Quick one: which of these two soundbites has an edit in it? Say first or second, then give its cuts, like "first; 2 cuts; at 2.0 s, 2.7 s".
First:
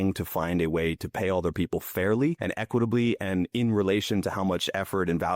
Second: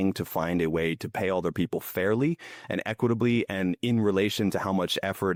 first; 1 cut; at 2.4 s